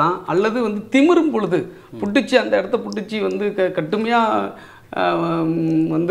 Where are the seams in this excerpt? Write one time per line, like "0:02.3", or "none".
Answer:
none

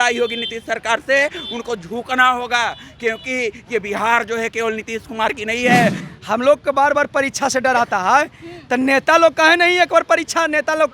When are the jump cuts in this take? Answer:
0:06.1

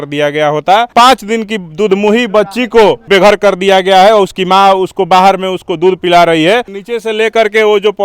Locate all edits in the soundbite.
0:00.9
0:03.0
0:06.8

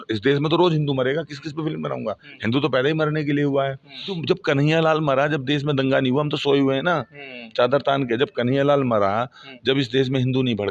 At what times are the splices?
0:04.2

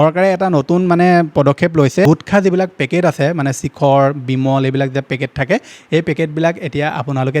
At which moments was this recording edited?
0:02.1

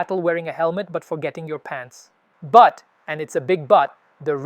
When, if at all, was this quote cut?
0:02.3

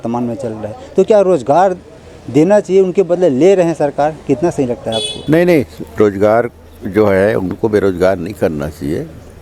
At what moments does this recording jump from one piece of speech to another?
none

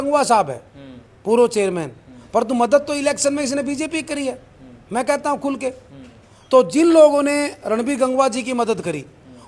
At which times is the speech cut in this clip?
none

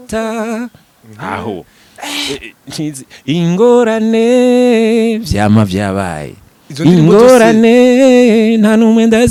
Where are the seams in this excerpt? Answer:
none

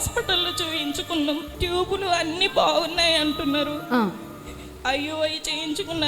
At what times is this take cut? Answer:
0:01.5

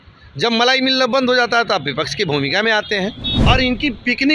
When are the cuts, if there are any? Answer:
0:03.3

